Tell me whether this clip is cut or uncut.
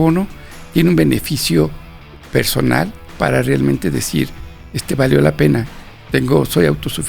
cut